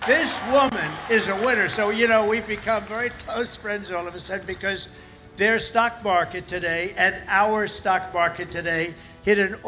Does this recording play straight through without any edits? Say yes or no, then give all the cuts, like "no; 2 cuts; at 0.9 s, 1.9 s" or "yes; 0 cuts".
yes; 0 cuts